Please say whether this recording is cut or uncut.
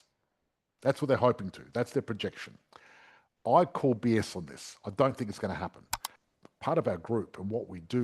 cut